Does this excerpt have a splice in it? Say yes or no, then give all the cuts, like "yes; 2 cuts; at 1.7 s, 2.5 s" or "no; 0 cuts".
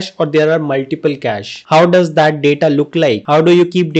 yes; 1 cut; at 1.6 s